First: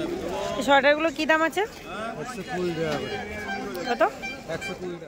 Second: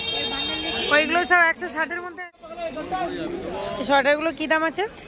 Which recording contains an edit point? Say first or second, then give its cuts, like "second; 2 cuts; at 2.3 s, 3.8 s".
second; 1 cut; at 2.2 s